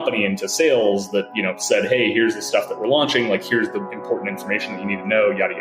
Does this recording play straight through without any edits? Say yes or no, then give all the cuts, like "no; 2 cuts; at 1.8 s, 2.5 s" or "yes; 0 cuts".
yes; 0 cuts